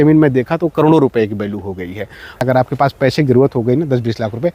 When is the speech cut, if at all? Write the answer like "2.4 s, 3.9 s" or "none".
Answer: 2.4 s